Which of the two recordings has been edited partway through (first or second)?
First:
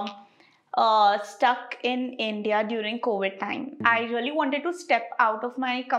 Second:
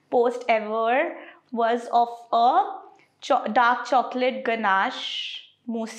first